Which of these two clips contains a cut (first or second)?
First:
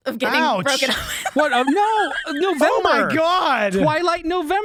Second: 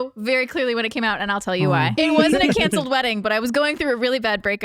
second